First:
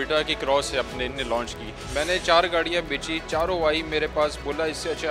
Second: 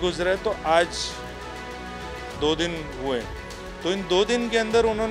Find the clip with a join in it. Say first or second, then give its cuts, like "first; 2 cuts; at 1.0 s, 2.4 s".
second; 2 cuts; at 1.1 s, 2.2 s